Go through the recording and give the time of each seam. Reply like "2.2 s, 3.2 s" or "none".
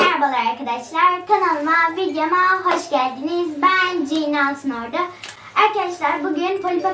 none